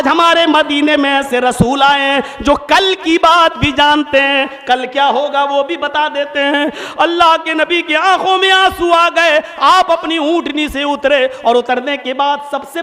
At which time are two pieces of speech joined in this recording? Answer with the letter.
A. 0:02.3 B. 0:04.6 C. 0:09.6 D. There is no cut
D